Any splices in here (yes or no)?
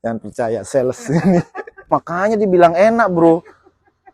yes